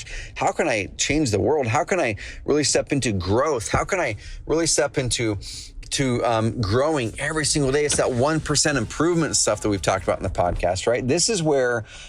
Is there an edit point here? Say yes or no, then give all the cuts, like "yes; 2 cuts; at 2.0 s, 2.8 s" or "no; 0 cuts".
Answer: no; 0 cuts